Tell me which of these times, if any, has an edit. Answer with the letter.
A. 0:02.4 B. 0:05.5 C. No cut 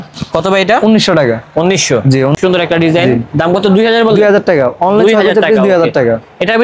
A